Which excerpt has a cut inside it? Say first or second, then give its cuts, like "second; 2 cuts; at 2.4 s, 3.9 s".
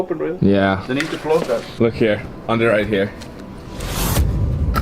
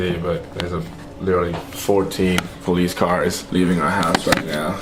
first; 1 cut; at 1.7 s